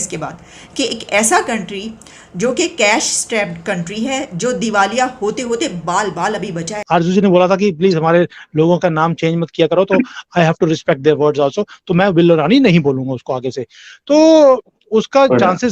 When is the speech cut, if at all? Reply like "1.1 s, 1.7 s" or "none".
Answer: 6.8 s